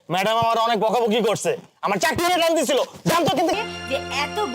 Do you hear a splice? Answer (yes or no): yes